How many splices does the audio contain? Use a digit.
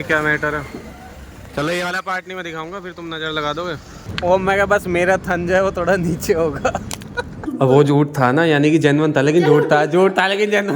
2